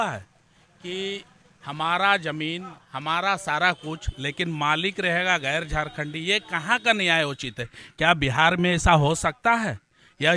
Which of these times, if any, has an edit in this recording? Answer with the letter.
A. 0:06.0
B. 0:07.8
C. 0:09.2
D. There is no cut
D